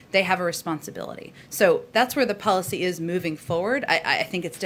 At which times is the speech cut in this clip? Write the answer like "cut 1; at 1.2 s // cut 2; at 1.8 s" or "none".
none